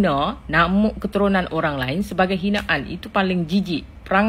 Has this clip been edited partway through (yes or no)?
no